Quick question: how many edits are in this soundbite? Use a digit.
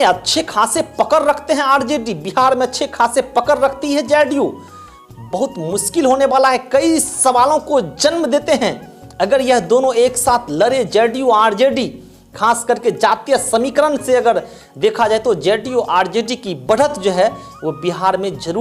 0